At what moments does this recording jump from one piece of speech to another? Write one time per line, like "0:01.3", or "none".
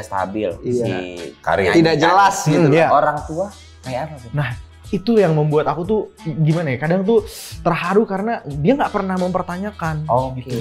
none